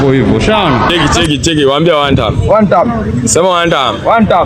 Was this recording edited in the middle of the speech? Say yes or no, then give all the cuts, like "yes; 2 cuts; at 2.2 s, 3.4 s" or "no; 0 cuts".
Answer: yes; 1 cut; at 0.9 s